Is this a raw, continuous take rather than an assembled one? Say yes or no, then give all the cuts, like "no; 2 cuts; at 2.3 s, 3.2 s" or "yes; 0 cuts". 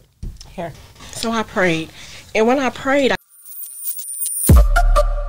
no; 1 cut; at 3.1 s